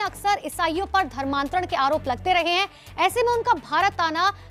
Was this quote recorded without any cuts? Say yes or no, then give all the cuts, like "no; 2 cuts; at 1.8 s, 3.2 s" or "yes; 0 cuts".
yes; 0 cuts